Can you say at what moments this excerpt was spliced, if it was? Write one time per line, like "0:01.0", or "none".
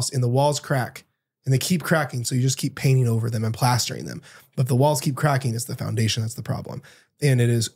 none